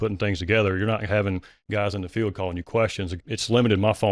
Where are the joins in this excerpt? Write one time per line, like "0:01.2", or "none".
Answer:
0:01.5